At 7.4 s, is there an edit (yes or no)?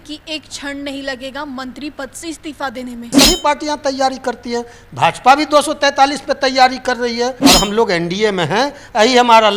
yes